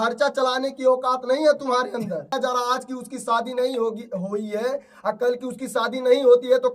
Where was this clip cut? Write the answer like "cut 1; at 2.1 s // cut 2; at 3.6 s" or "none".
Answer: cut 1; at 2.3 s